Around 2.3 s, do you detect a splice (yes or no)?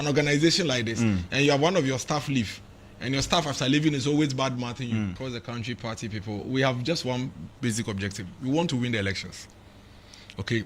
no